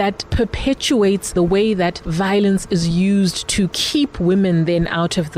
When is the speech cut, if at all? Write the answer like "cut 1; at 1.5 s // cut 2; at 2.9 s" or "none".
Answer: cut 1; at 1.3 s // cut 2; at 2.0 s